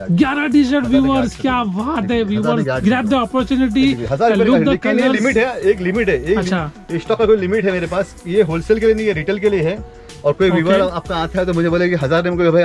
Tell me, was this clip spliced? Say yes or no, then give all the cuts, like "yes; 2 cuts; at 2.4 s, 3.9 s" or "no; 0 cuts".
no; 0 cuts